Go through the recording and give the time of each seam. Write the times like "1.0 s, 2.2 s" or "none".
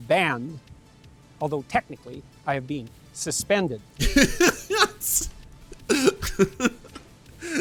none